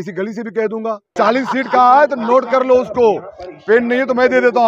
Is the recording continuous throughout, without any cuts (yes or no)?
no